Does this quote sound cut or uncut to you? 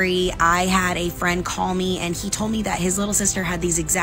uncut